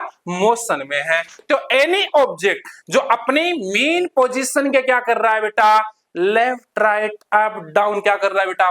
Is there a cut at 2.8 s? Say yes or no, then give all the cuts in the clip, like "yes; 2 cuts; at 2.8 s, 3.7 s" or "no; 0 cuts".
no; 1 cut; at 1.4 s